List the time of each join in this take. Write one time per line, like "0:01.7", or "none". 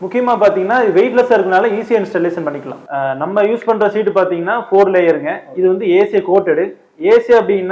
0:02.7